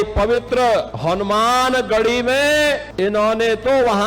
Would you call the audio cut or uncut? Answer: cut